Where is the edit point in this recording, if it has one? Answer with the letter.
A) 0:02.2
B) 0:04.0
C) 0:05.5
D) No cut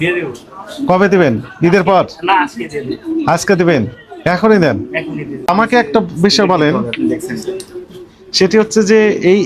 C